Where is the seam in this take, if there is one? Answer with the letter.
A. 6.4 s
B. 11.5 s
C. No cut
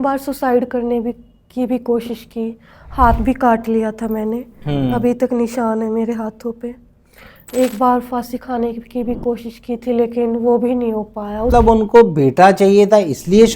B